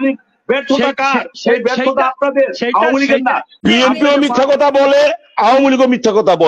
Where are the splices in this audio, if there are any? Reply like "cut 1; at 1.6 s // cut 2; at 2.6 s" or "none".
cut 1; at 3.6 s

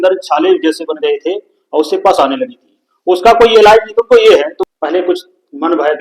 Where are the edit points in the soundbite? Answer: cut 1; at 4.6 s

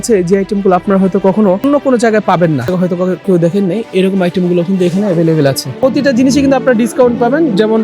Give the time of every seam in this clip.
cut 1; at 1.6 s // cut 2; at 2.7 s // cut 3; at 5.8 s

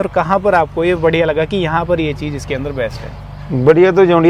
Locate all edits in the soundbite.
none

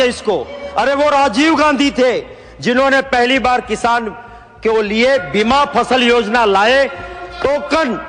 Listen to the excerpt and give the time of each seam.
none

